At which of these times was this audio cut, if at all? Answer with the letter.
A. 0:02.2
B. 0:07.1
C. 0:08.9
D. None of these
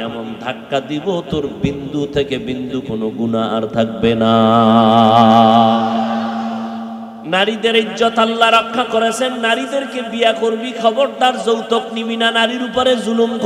B